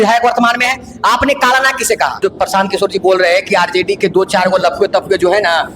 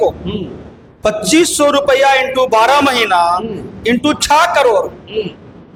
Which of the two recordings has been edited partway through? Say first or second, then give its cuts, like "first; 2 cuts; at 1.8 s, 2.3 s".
first; 1 cut; at 2.1 s